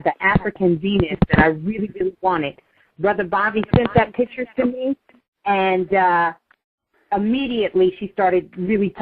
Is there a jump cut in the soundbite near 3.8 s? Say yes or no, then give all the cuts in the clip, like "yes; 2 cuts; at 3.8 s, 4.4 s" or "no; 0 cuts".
yes; 1 cut; at 3.8 s